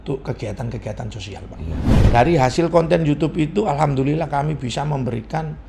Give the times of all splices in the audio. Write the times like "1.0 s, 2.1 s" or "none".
1.8 s